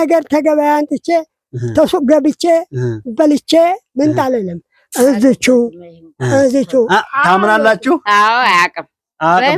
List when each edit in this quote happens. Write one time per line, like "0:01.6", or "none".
none